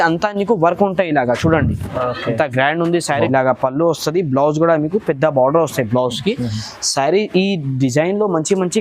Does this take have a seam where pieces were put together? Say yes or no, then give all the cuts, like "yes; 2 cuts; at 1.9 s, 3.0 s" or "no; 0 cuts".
yes; 1 cut; at 3.2 s